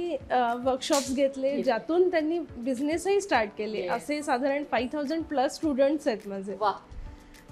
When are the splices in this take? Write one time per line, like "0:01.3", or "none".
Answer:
none